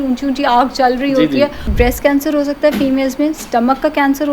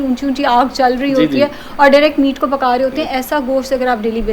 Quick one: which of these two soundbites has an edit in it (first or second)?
first